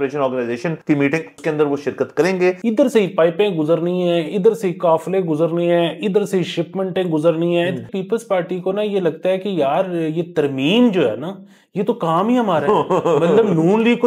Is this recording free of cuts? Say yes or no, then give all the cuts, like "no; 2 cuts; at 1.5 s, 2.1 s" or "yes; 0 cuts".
no; 3 cuts; at 1.1 s, 2.6 s, 7.9 s